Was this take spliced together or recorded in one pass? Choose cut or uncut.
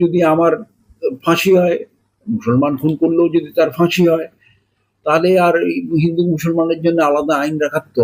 uncut